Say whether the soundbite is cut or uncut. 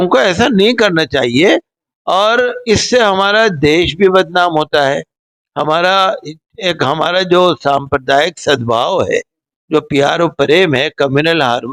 uncut